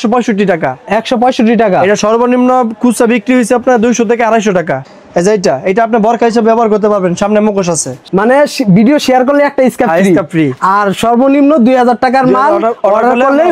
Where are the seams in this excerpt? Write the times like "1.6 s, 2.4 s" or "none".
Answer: 4.8 s, 8.0 s